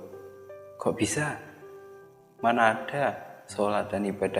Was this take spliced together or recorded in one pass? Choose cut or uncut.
uncut